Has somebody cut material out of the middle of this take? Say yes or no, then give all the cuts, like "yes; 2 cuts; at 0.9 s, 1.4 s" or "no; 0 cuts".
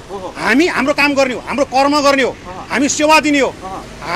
no; 0 cuts